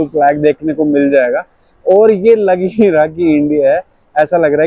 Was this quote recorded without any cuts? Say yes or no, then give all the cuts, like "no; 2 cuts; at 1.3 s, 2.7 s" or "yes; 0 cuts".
yes; 0 cuts